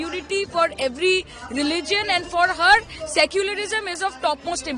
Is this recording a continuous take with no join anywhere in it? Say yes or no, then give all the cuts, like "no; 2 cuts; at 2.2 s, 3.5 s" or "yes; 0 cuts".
yes; 0 cuts